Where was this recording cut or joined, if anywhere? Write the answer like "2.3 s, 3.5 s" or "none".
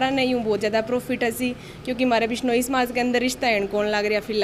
none